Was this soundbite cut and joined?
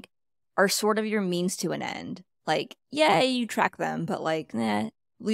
no; 0 cuts

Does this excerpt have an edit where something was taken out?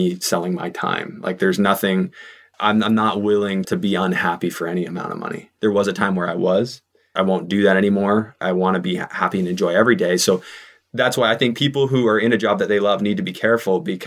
yes; 3 cuts; at 3.7 s, 5.5 s, 7.1 s

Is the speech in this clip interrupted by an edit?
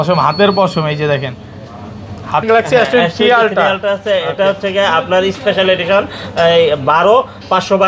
yes; 1 cut; at 2.4 s

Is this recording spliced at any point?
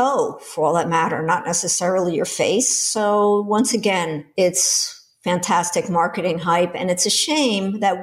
no; 0 cuts

